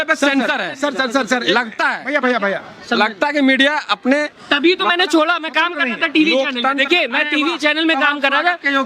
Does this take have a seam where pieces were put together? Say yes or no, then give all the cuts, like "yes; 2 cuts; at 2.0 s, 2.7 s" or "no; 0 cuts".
no; 0 cuts